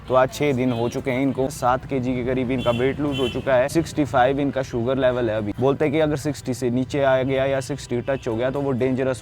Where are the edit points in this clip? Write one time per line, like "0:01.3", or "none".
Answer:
0:01.5
0:03.7
0:05.5